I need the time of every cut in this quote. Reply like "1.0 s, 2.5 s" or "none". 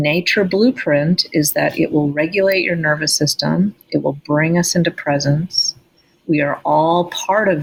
none